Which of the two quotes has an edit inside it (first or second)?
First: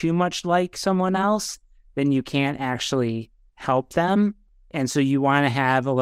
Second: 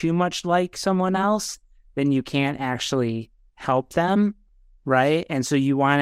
first